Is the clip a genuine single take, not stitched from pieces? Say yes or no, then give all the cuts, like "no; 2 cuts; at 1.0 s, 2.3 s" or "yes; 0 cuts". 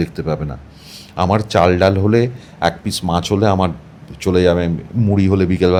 yes; 0 cuts